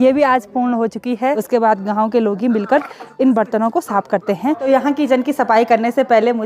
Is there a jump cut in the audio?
yes; 2 cuts; at 1.4 s, 4.6 s

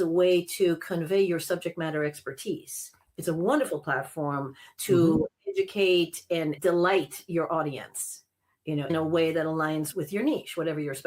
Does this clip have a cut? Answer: yes; 3 cuts; at 6.6 s, 8.9 s, 9.9 s

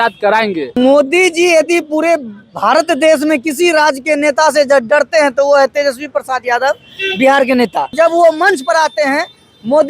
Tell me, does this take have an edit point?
yes; 2 cuts; at 0.8 s, 7.9 s

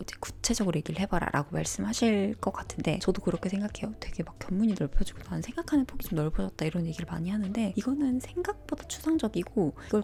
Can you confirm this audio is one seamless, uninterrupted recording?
yes; 0 cuts

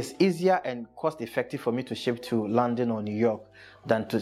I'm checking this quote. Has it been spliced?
no; 0 cuts

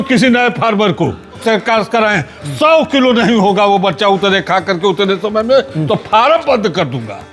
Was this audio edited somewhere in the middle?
yes; 1 cut; at 1.4 s

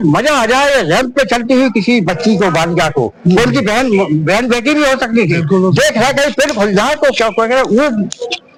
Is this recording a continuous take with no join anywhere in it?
yes; 0 cuts

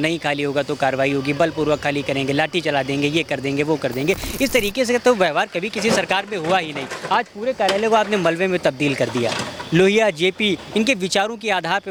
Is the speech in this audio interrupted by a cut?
no; 0 cuts

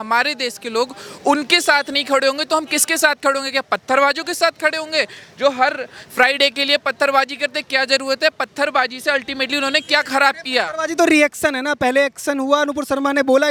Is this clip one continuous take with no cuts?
yes; 0 cuts

